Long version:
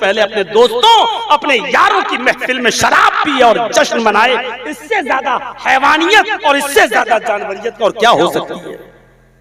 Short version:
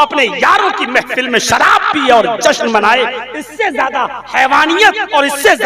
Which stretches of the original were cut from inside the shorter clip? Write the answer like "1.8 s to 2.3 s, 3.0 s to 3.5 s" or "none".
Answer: none